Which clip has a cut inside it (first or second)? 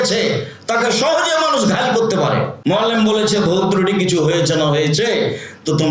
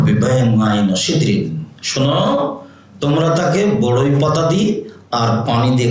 first